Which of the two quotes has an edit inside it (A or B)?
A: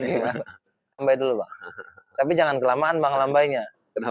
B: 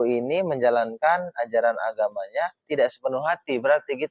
A